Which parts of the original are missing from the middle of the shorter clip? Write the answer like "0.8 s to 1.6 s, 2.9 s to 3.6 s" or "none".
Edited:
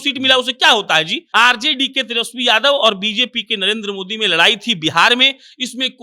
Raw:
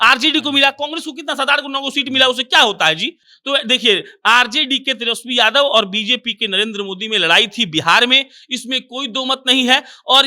3.1 s to 4.1 s